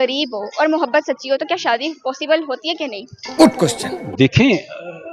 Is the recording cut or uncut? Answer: uncut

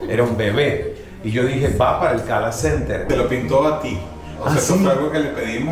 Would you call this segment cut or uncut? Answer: cut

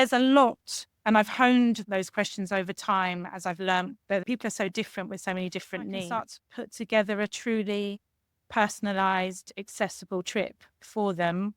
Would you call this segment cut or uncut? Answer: cut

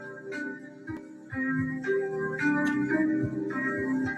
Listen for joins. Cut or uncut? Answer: cut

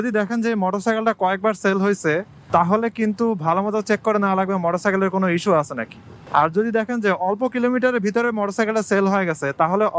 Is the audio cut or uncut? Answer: uncut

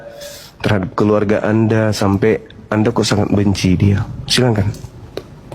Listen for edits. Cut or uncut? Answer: uncut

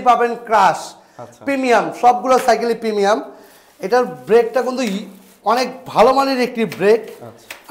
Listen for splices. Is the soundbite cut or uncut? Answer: uncut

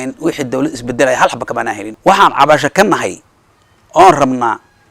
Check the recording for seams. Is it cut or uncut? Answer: cut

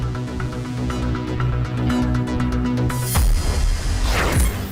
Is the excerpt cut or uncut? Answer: uncut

